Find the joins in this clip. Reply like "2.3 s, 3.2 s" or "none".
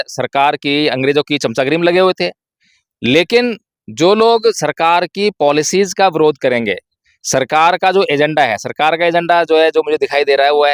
none